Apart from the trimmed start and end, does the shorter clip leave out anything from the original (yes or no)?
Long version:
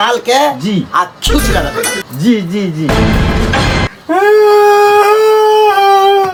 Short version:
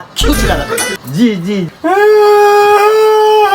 yes